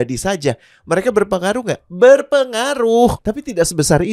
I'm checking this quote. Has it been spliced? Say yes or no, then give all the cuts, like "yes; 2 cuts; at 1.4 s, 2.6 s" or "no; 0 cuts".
yes; 1 cut; at 3.2 s